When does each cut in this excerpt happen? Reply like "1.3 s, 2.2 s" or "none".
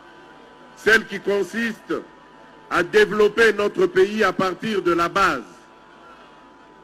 none